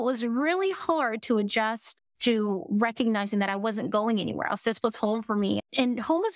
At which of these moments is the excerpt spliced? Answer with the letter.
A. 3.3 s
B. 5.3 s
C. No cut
C